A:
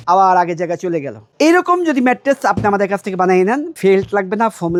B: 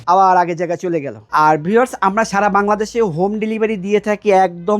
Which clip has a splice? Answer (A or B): B